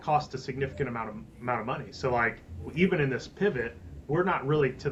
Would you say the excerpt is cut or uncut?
uncut